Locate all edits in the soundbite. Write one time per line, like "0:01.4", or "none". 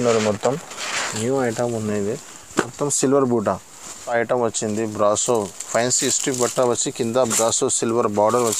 0:04.0